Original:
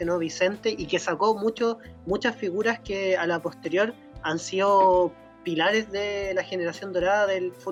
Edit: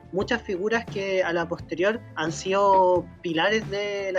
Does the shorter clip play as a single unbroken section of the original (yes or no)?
no